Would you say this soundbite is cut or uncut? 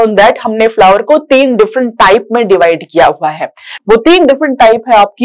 uncut